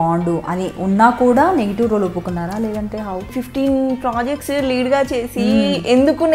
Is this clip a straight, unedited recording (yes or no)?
no